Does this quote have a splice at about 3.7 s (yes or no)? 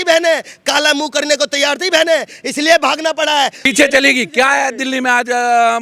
yes